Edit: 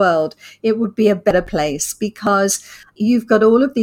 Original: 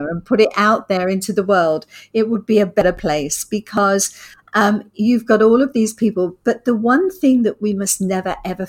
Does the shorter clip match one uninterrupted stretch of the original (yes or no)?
no